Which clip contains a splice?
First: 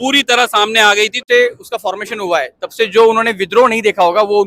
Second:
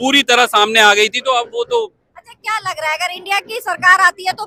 first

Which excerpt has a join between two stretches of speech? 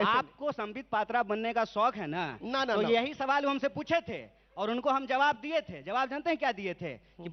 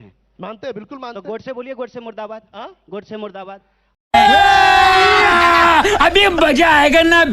second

